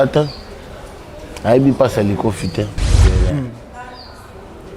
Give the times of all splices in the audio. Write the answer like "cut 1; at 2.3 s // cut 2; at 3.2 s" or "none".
cut 1; at 3.0 s